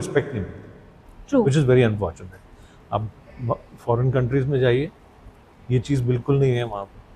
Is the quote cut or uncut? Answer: uncut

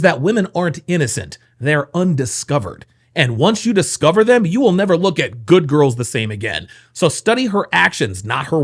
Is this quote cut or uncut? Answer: uncut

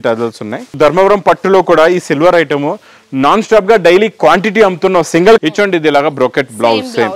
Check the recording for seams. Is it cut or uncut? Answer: cut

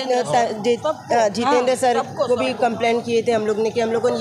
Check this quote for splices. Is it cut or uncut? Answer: uncut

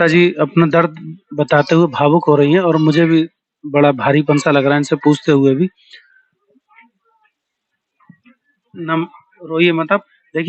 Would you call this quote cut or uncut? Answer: uncut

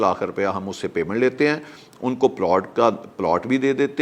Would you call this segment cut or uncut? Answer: uncut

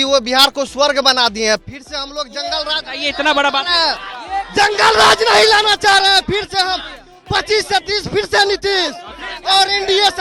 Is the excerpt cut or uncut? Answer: uncut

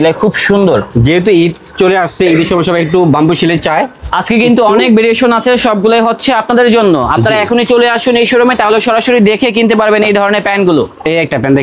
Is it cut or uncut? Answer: uncut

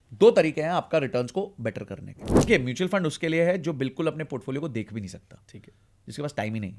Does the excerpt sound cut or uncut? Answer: cut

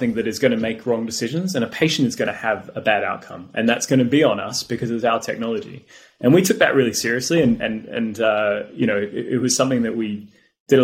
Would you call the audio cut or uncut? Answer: uncut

